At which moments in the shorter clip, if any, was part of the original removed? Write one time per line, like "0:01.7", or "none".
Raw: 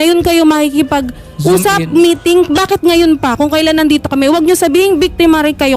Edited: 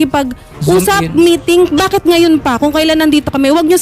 none